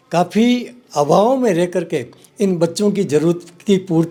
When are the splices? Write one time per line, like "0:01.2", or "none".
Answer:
none